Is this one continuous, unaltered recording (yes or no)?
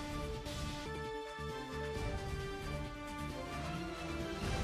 yes